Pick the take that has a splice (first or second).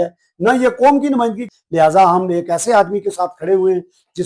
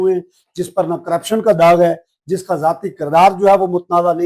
first